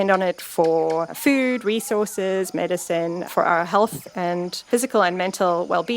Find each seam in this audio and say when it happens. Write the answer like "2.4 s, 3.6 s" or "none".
1.1 s, 3.3 s, 4.7 s